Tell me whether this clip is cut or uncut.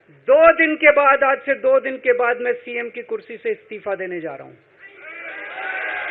uncut